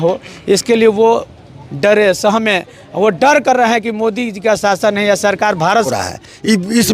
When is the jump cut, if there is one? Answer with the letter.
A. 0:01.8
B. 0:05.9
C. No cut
B